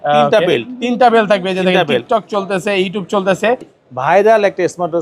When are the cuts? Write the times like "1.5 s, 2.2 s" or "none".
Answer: 3.8 s